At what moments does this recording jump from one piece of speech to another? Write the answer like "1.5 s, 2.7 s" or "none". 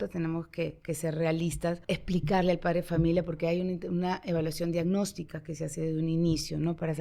1.8 s